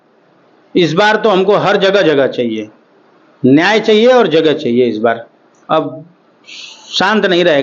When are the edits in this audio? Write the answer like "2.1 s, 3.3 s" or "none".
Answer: none